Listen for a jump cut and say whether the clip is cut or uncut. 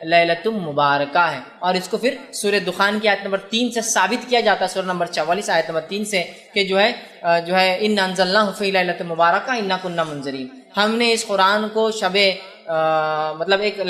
uncut